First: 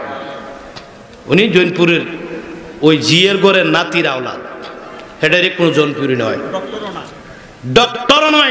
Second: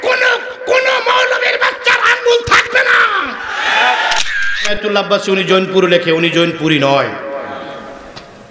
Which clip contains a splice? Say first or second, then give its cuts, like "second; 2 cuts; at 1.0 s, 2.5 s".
second; 1 cut; at 4.5 s